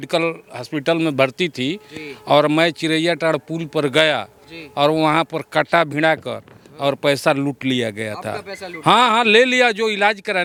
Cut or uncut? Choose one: uncut